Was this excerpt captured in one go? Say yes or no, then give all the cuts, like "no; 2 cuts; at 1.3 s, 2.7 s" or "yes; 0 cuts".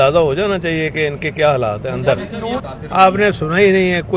no; 1 cut; at 2.7 s